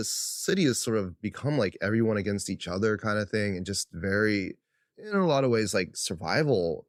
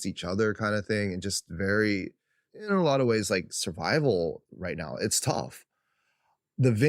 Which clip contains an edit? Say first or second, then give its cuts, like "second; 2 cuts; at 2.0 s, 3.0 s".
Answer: second; 1 cut; at 5.8 s